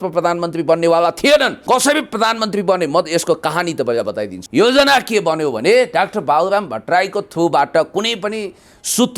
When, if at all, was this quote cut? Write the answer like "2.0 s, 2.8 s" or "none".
1.6 s, 4.3 s